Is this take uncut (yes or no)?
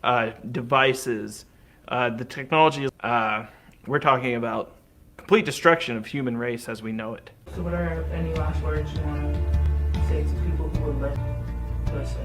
no